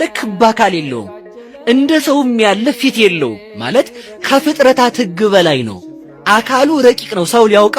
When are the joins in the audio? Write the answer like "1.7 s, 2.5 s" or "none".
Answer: none